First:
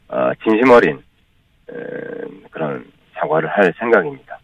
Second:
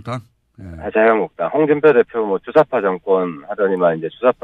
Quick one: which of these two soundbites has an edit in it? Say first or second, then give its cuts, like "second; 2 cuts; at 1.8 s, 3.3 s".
second; 1 cut; at 1.3 s